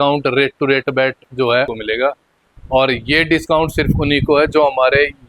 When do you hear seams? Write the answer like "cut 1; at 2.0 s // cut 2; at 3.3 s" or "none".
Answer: cut 1; at 1.7 s